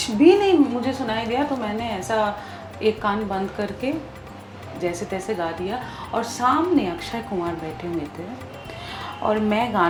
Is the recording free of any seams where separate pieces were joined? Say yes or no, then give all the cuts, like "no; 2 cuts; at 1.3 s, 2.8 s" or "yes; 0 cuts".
yes; 0 cuts